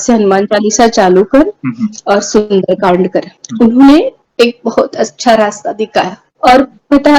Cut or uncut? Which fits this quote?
cut